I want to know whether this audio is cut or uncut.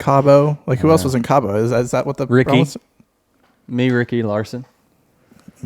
uncut